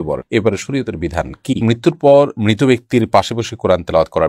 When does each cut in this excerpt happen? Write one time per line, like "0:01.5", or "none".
0:01.6